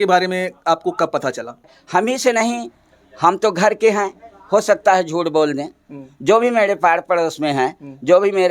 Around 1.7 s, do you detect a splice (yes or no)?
yes